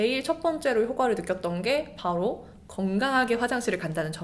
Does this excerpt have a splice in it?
no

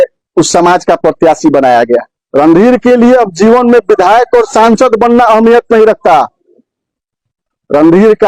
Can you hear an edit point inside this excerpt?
yes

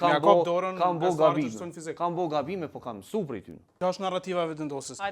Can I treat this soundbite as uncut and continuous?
no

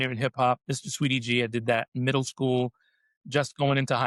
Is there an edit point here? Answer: no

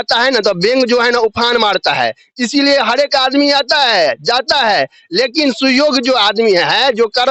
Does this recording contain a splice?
no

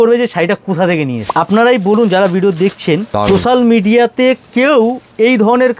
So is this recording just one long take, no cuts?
no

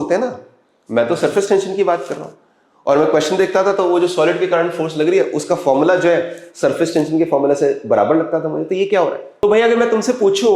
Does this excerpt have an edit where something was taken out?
yes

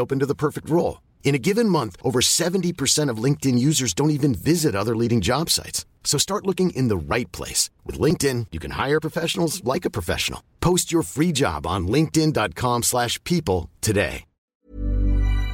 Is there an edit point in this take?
yes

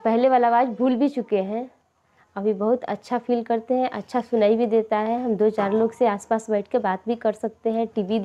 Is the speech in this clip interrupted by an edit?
no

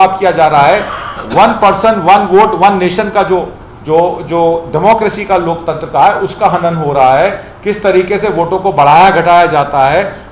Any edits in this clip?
no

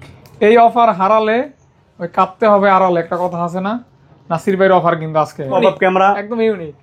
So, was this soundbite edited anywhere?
yes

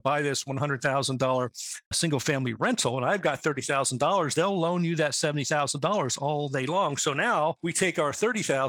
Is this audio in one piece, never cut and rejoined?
yes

